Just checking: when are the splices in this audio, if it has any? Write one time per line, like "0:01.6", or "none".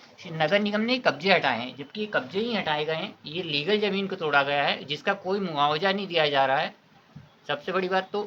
none